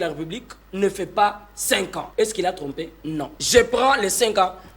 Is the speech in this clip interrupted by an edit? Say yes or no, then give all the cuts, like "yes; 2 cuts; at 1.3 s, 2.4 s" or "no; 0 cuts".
yes; 2 cuts; at 2.0 s, 3.4 s